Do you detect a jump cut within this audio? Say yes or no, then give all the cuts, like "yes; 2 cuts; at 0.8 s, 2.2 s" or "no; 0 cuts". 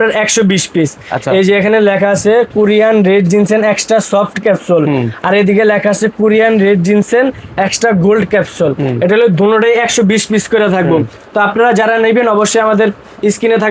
no; 0 cuts